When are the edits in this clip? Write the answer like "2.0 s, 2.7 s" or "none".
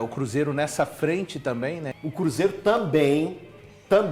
1.9 s

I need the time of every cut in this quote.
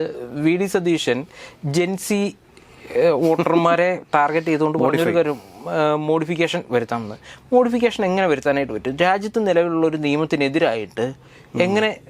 none

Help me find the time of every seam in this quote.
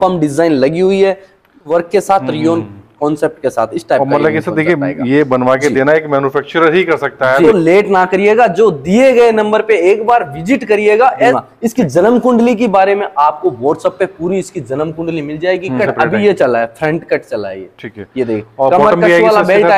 1.7 s, 7.5 s, 11.4 s, 15.8 s

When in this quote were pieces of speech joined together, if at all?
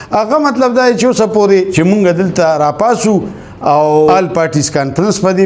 1.7 s, 4.1 s

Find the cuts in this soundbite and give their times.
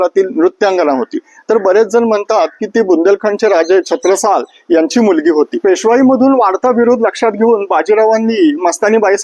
5.5 s

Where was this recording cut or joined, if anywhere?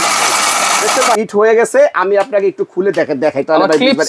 1.1 s

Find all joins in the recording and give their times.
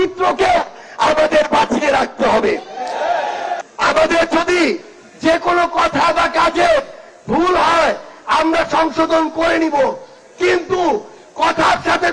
3.6 s

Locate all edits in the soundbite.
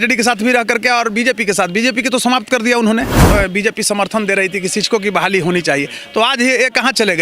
3.2 s

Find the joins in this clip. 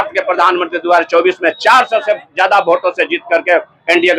none

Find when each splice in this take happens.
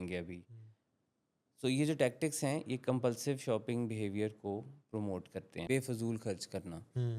5.6 s

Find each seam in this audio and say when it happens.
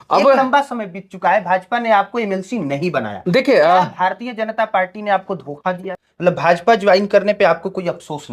5.9 s

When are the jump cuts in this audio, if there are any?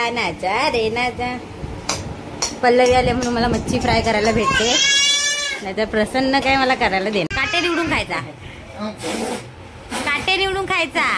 7.3 s

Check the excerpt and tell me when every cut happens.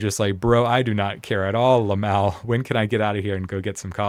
none

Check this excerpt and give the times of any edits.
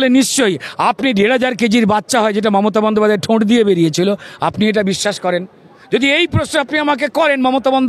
none

